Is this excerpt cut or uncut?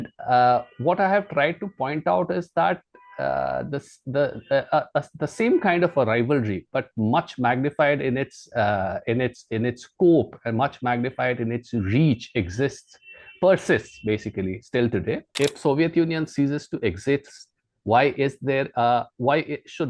cut